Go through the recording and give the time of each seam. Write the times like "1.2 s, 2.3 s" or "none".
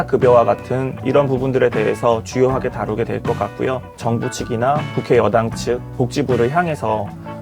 0.9 s, 3.9 s, 4.9 s